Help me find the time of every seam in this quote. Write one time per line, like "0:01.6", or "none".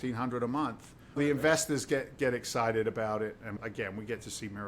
0:01.2
0:03.6